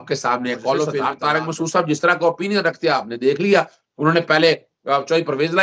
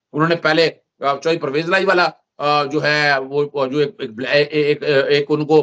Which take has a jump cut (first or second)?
first